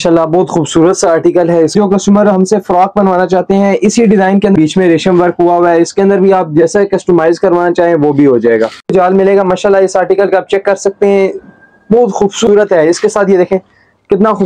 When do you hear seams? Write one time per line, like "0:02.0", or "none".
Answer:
0:01.7
0:04.5
0:08.8
0:12.4